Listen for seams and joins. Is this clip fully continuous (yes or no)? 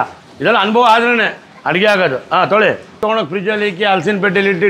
no